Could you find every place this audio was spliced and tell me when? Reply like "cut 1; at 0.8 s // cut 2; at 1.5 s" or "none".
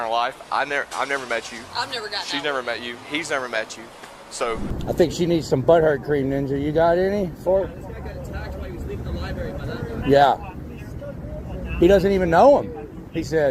cut 1; at 4.7 s